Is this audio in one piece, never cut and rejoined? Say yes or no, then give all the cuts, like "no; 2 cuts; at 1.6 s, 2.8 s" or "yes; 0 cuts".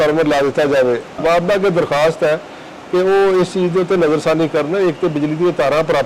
no; 1 cut; at 1.2 s